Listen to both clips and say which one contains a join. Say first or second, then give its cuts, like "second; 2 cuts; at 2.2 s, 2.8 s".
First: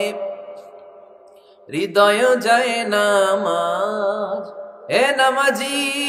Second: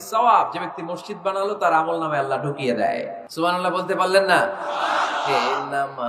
second; 1 cut; at 3.2 s